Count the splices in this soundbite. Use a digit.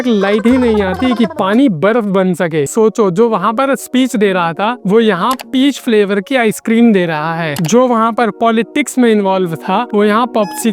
0